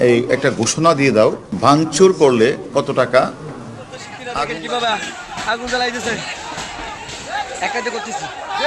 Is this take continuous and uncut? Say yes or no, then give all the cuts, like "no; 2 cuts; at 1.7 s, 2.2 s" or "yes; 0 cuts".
no; 1 cut; at 4.2 s